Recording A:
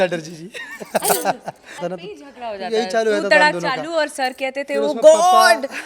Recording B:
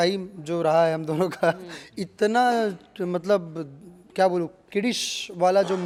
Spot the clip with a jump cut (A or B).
A